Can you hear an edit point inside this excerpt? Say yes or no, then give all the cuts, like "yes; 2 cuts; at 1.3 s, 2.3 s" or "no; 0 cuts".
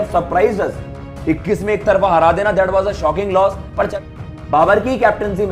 yes; 1 cut; at 3.9 s